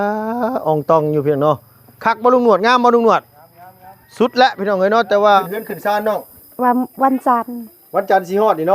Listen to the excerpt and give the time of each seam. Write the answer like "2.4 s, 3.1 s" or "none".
5.3 s